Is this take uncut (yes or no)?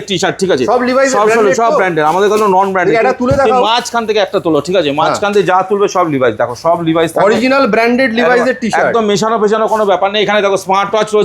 yes